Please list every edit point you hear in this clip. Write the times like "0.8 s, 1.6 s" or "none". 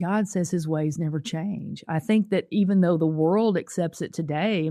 none